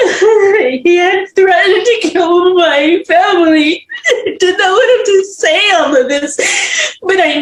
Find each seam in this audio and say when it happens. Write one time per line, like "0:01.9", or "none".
none